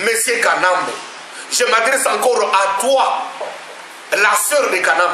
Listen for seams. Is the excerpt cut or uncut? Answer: uncut